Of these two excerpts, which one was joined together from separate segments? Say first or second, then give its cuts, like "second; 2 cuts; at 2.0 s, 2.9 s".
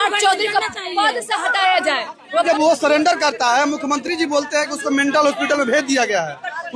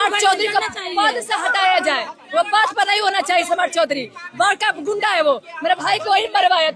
first; 1 cut; at 2.5 s